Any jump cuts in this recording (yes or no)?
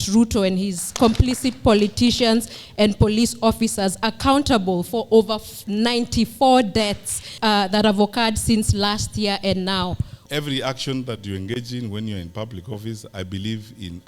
yes